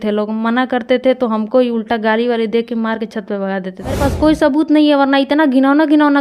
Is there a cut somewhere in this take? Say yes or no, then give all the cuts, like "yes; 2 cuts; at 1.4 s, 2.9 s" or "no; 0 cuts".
yes; 1 cut; at 4.0 s